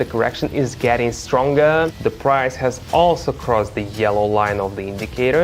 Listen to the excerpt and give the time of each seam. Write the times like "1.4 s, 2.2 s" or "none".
1.9 s